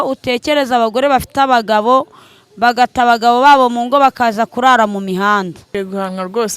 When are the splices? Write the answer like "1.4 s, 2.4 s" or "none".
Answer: 5.6 s